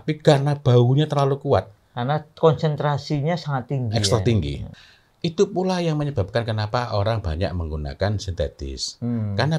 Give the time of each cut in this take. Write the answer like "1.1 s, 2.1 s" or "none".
4.7 s

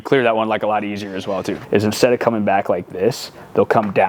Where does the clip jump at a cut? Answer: 1.6 s

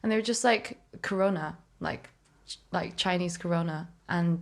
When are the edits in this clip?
none

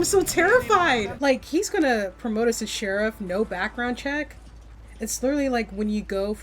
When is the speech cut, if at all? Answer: 1.1 s

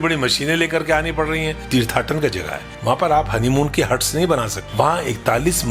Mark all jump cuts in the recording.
2.6 s, 4.6 s

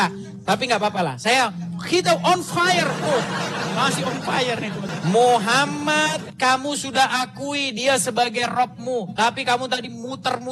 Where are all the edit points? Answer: 4.9 s

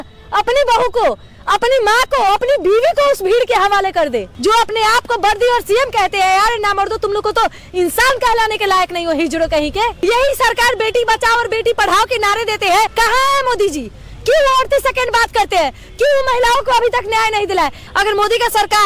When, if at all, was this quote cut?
4.3 s, 10.0 s, 12.9 s, 17.8 s

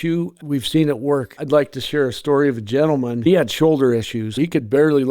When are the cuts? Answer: 1.3 s, 3.3 s, 4.3 s

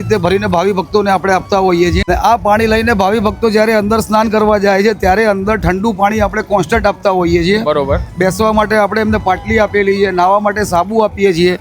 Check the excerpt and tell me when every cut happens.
2.1 s

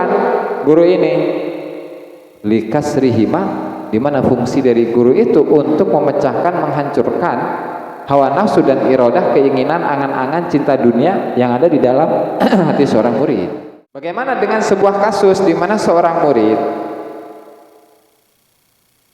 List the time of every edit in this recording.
14.1 s

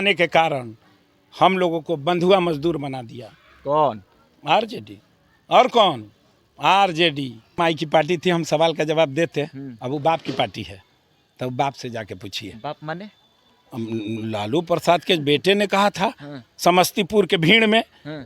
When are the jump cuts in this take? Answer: 7.5 s

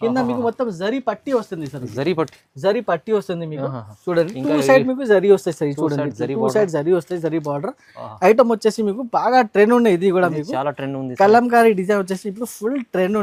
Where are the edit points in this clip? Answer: none

